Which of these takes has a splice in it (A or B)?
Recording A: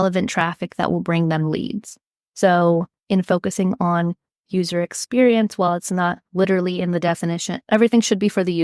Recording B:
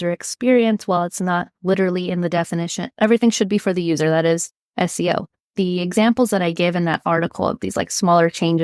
B